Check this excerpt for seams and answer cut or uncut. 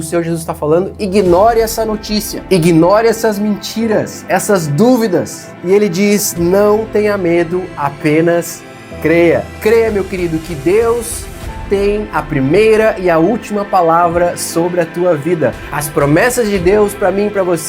cut